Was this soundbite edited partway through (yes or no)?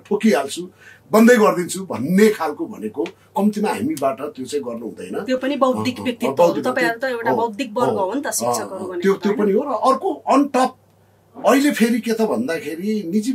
no